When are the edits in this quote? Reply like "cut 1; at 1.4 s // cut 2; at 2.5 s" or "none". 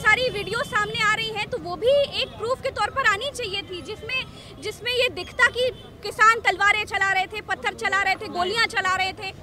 none

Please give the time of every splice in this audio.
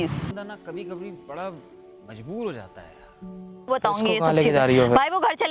cut 1; at 3.7 s

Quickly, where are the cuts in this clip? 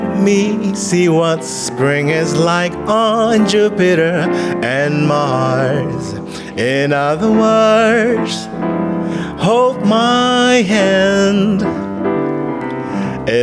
none

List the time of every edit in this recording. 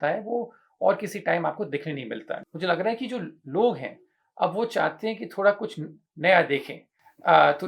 cut 1; at 2.4 s

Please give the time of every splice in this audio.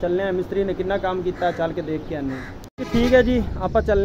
cut 1; at 2.6 s

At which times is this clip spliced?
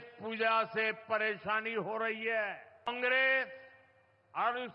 cut 1; at 2.9 s

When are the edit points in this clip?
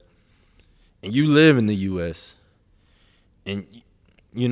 none

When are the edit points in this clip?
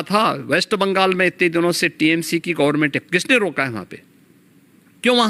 none

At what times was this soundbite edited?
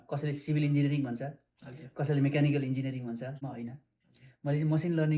cut 1; at 3.4 s

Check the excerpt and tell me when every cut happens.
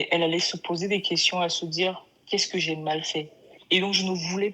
cut 1; at 3.5 s

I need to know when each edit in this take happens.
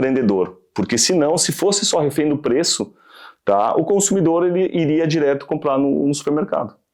none

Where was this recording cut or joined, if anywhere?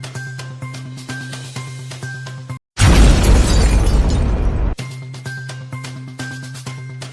cut 1; at 2.5 s

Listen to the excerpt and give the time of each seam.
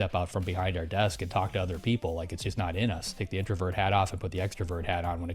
cut 1; at 3.1 s

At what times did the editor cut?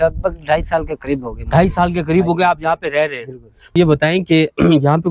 cut 1; at 3.8 s

